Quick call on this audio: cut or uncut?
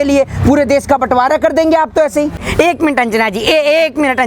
cut